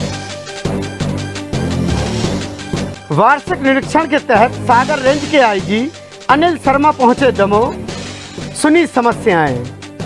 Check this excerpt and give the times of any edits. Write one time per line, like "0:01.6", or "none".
none